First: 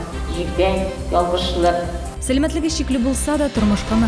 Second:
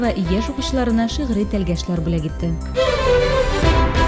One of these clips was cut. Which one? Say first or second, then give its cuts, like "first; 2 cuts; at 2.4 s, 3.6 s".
second; 1 cut; at 2.6 s